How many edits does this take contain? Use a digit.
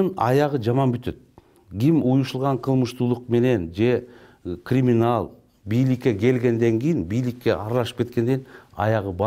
0